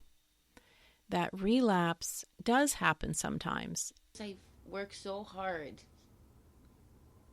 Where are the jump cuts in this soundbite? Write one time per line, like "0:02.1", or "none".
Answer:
0:04.2